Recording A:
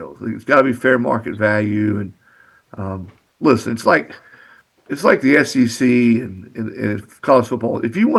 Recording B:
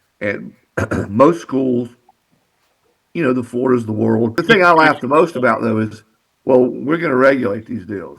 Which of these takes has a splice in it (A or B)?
B